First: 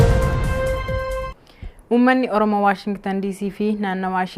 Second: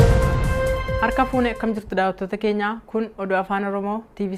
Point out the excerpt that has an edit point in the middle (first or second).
first